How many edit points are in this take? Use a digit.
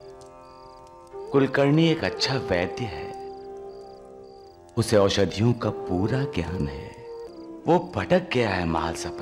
1